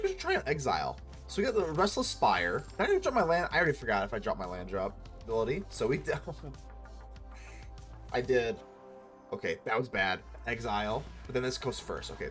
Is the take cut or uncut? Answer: cut